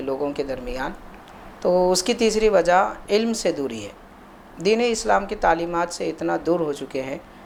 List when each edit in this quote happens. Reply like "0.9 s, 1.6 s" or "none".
none